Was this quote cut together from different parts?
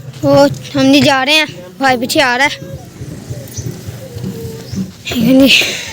yes; 1 cut; at 5.0 s

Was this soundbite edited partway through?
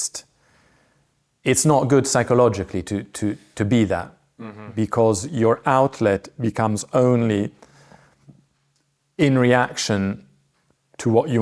no; 0 cuts

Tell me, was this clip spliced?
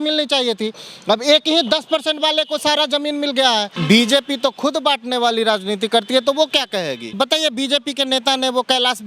yes; 2 cuts; at 3.7 s, 7.2 s

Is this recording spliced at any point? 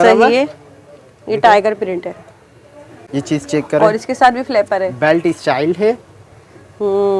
no; 0 cuts

